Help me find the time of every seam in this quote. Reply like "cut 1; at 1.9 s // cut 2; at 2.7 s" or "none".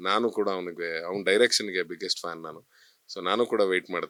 none